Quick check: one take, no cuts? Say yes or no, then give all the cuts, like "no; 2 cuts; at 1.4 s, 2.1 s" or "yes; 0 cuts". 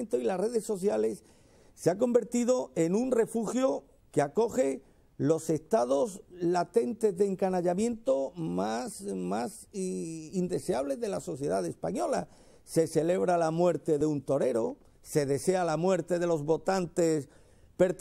no; 1 cut; at 9.6 s